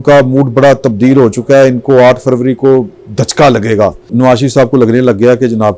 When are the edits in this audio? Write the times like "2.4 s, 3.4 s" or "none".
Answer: 4.1 s